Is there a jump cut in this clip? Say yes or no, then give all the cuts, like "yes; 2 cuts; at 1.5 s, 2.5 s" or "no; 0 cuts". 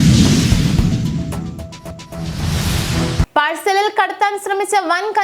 yes; 1 cut; at 2.1 s